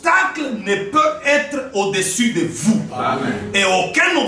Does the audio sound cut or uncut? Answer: uncut